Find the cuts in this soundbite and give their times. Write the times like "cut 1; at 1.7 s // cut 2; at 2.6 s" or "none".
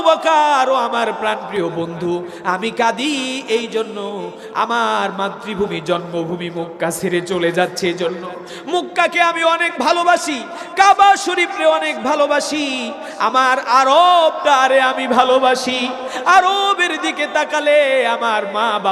none